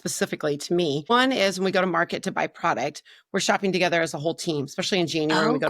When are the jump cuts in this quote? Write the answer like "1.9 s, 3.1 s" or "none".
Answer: 1.1 s